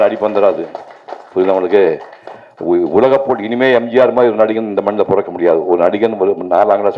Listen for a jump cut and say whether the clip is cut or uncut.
uncut